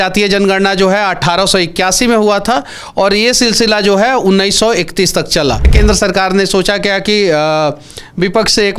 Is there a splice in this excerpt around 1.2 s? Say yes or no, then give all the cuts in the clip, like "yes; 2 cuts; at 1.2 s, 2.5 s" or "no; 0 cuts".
no; 1 cut; at 5.7 s